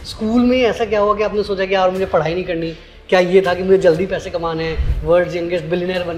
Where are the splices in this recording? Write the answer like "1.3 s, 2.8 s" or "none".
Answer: none